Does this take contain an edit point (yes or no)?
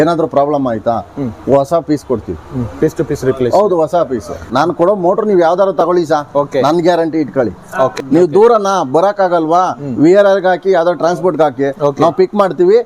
yes